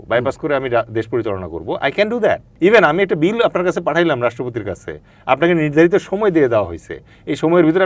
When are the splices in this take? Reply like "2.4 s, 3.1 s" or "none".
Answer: 2.5 s